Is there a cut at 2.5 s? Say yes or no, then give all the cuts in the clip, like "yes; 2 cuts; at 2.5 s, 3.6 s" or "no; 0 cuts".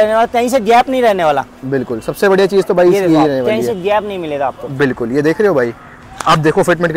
no; 0 cuts